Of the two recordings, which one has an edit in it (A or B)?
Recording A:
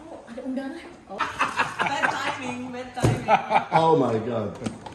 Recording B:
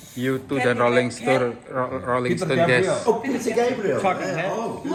A